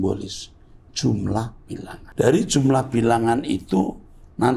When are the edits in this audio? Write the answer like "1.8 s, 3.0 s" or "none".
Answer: 2.0 s